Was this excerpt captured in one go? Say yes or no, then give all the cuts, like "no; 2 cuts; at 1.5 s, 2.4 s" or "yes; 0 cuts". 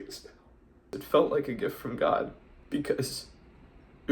no; 2 cuts; at 0.9 s, 2.5 s